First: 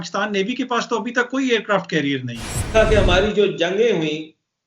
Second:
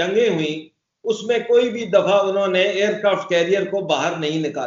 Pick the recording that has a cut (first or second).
first